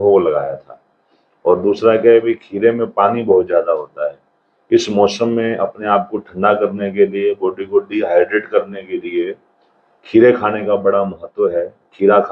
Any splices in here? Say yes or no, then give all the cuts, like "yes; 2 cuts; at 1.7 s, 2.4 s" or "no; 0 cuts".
no; 0 cuts